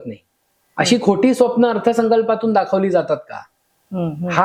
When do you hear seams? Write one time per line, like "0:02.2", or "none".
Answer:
none